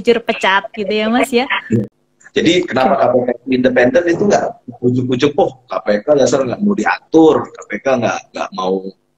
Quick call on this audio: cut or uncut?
cut